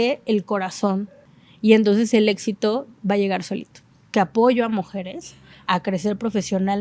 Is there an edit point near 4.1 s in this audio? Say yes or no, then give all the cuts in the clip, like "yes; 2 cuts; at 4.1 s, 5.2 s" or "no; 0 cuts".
yes; 2 cuts; at 1.2 s, 4.1 s